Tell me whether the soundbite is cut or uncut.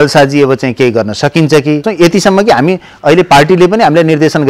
cut